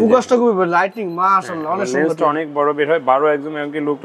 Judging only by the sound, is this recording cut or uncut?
uncut